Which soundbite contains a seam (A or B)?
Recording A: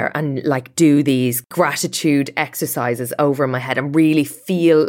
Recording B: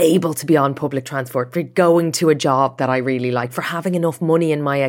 A